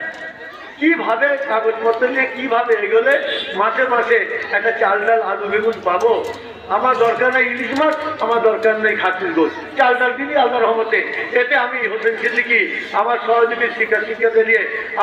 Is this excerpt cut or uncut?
uncut